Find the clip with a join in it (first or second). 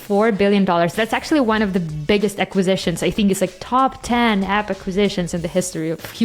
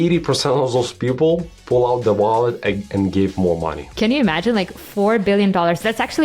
second